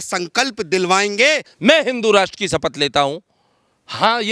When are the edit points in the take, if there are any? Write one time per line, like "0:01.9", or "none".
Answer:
0:01.5